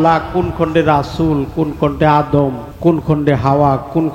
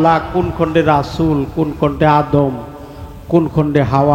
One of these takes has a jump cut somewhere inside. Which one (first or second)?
first